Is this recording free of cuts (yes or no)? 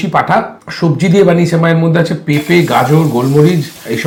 yes